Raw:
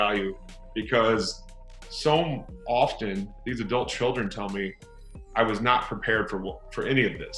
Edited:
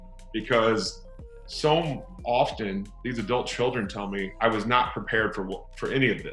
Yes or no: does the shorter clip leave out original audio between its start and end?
yes